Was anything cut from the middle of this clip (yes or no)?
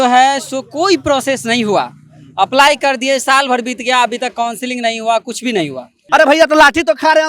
yes